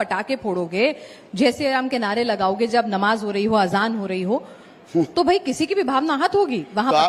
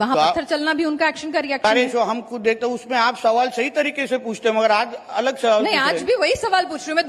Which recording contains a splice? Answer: second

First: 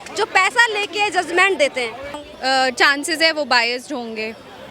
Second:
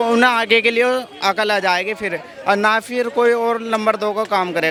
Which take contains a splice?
first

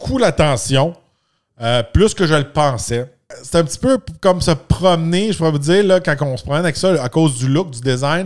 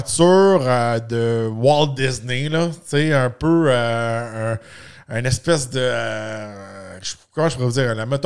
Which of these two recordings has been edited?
first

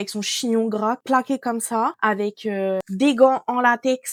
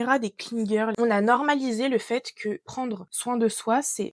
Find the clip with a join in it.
second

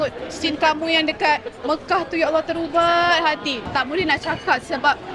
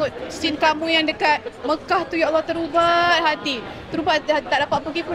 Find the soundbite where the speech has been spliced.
first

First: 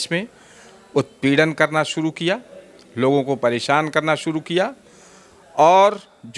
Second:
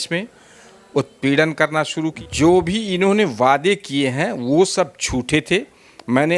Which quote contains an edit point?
second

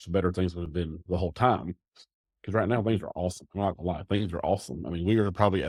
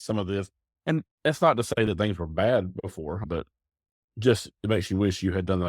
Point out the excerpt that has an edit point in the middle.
second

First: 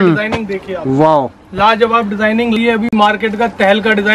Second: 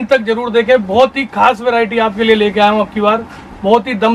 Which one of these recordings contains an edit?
first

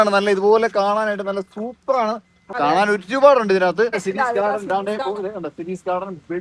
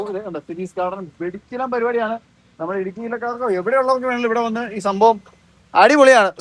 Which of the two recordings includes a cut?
first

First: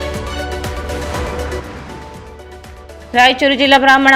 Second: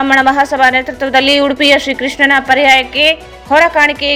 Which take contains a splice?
first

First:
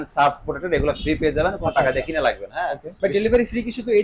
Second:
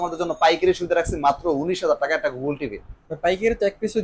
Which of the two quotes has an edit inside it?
first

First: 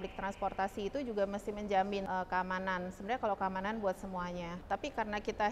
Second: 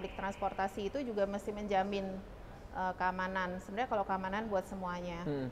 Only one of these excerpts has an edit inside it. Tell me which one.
first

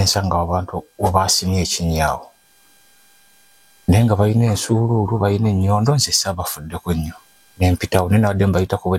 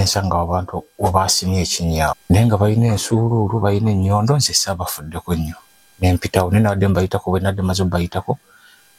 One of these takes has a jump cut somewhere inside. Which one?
second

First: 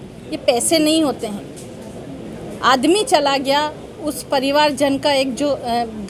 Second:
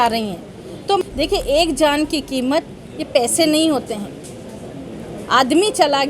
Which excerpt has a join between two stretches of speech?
second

